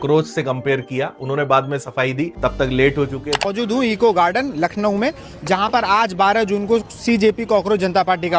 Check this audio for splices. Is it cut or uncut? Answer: cut